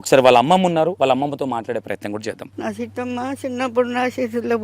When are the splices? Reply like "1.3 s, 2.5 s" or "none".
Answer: 1.0 s, 2.5 s